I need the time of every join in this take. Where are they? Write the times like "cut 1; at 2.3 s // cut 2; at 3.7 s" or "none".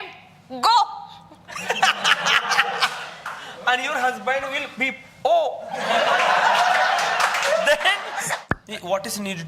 cut 1; at 8.4 s